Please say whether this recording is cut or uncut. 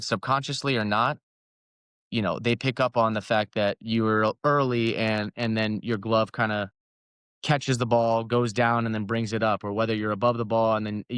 uncut